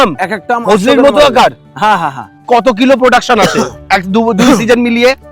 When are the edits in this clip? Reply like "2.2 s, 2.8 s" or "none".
2.4 s